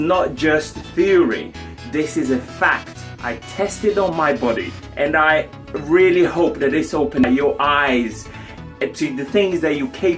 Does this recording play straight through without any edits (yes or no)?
no